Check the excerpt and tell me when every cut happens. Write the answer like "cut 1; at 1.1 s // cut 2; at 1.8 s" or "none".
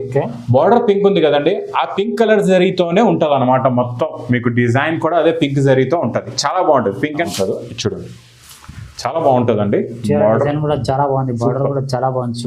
cut 1; at 7.2 s